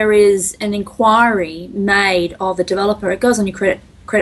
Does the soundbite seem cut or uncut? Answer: uncut